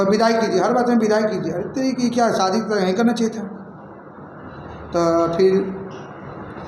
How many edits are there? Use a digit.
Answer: 0